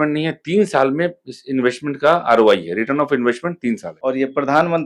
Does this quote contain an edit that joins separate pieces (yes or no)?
yes